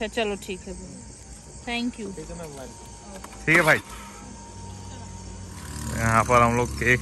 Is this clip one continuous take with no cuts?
yes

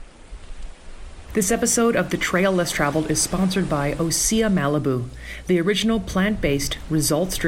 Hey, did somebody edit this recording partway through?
yes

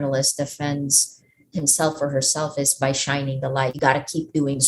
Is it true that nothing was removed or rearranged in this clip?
no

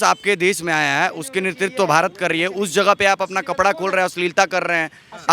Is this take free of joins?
yes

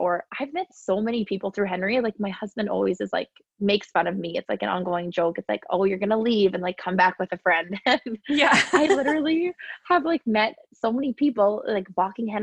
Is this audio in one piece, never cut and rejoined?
yes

